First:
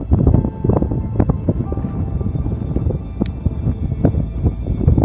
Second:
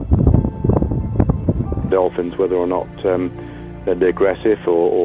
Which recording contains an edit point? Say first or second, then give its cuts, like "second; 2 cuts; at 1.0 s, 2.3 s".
first; 1 cut; at 1.9 s